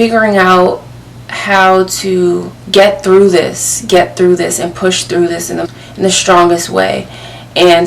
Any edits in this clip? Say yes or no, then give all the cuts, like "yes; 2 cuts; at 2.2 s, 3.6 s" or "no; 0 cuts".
yes; 2 cuts; at 2.5 s, 5.7 s